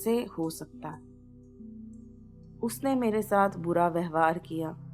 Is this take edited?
yes; 2 cuts; at 1.0 s, 2.4 s

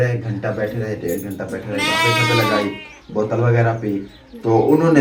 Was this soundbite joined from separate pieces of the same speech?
no; 0 cuts

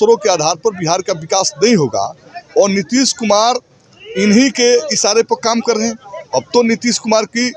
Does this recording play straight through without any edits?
yes; 0 cuts

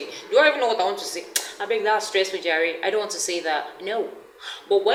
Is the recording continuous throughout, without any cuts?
yes; 0 cuts

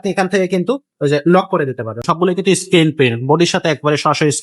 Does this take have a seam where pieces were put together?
yes; 1 cut; at 2.0 s

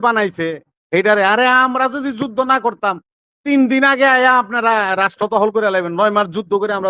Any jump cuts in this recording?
no; 0 cuts

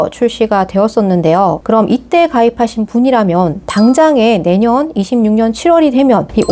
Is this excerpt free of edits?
yes; 0 cuts

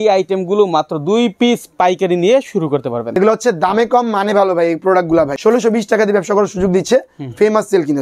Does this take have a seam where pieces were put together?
yes; 2 cuts; at 3.1 s, 5.3 s

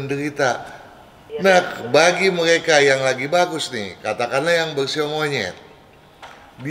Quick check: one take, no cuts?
no; 1 cut; at 1.3 s

